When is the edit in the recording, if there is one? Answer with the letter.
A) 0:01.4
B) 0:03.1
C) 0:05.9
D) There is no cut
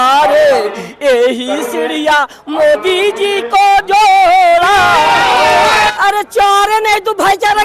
C